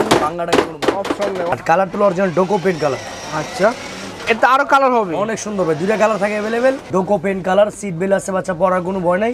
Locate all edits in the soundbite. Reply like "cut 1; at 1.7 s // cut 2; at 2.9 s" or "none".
cut 1; at 1.5 s // cut 2; at 6.8 s